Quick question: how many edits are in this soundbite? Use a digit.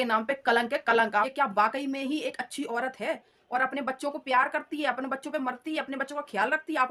0